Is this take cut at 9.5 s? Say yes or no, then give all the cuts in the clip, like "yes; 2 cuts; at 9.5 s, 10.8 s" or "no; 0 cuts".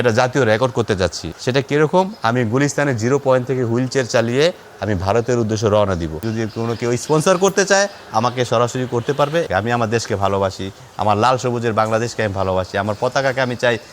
yes; 2 cuts; at 6.2 s, 9.5 s